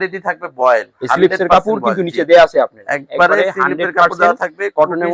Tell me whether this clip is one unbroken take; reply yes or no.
yes